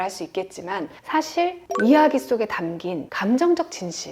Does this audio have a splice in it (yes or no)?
yes